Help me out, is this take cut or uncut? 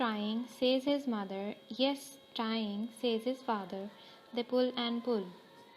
uncut